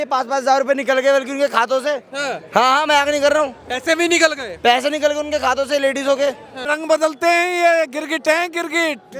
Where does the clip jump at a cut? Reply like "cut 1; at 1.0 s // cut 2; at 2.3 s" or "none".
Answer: cut 1; at 6.7 s